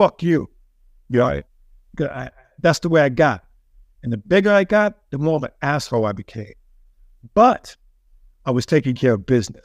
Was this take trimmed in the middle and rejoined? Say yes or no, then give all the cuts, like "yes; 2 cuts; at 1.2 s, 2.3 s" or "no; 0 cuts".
no; 0 cuts